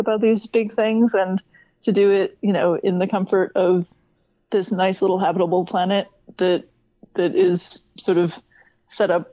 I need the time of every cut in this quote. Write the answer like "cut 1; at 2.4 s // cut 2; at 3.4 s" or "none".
none